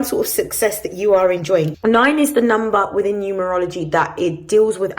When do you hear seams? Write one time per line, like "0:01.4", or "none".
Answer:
0:01.7